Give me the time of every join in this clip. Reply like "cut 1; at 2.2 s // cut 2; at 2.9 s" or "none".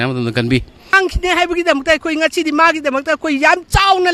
cut 1; at 0.9 s